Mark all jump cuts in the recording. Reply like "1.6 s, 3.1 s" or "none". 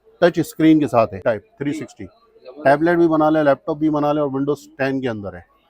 1.2 s